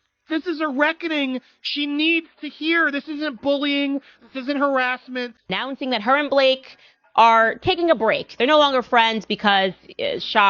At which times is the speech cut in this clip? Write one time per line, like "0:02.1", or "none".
0:05.5